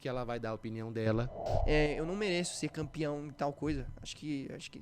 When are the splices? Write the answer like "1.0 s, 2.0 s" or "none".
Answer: 1.5 s